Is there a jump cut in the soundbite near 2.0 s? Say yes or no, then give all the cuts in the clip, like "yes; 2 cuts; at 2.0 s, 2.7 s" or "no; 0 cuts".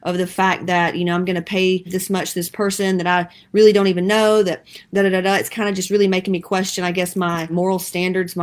yes; 1 cut; at 2.0 s